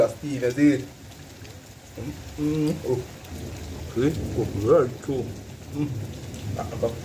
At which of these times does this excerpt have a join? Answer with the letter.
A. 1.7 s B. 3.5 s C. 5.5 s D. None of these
D